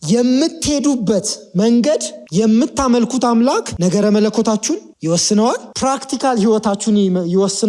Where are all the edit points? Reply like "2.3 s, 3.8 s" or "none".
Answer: 2.2 s, 3.7 s, 4.9 s, 5.7 s